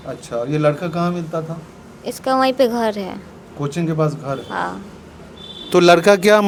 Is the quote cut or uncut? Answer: uncut